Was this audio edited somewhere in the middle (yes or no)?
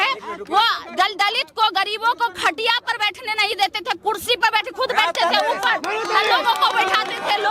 no